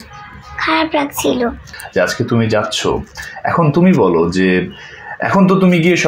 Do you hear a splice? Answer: yes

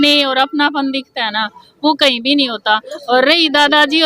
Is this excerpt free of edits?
yes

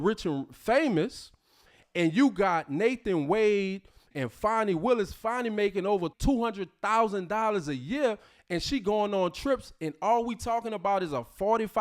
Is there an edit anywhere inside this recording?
yes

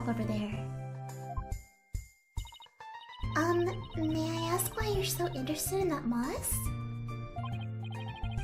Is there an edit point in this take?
no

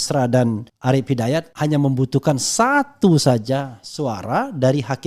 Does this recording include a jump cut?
yes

